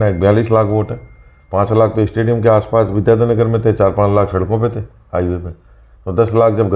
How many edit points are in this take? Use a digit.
0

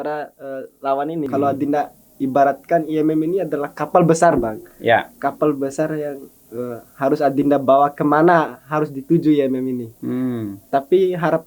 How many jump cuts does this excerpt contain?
1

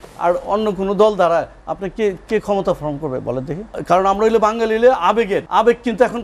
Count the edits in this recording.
2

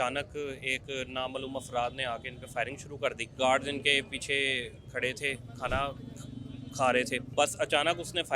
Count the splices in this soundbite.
2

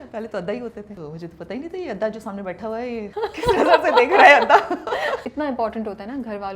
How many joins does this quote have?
3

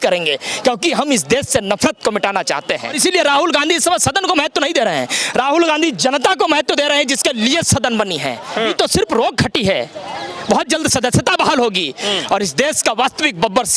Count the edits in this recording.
2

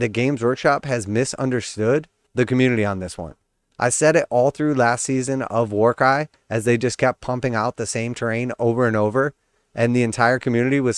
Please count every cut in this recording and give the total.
0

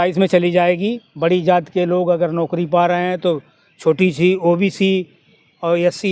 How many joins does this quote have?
1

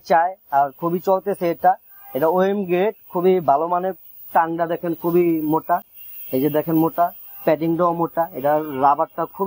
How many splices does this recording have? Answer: 0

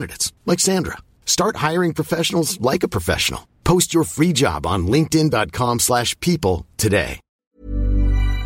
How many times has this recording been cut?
1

